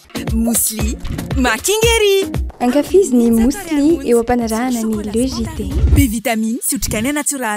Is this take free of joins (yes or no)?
yes